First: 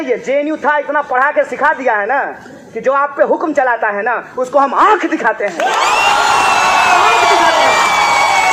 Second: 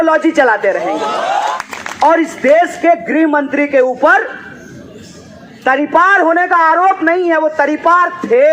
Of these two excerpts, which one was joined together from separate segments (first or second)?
second